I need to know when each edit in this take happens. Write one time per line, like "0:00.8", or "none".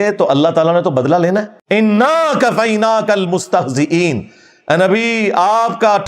none